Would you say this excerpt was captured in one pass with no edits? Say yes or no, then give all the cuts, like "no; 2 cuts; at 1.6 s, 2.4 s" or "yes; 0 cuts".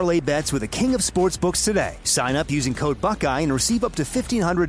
yes; 0 cuts